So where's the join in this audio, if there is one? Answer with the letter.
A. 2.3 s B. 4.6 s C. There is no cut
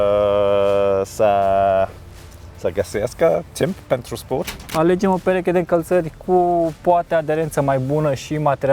B